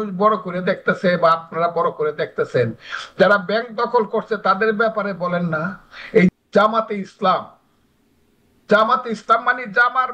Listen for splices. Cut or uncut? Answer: cut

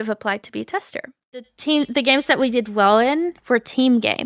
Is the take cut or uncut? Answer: cut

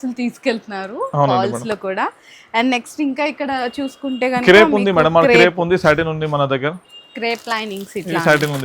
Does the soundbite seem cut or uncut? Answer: uncut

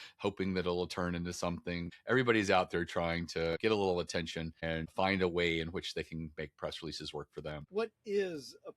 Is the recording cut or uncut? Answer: cut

